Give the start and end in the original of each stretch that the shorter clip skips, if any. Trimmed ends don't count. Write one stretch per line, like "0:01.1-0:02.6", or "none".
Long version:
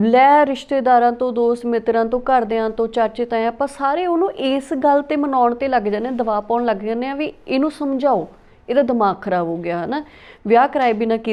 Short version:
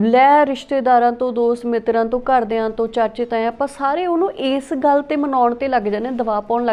none